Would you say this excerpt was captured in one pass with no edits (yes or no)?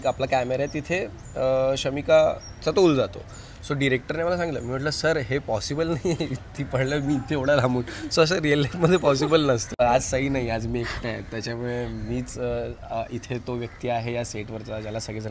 no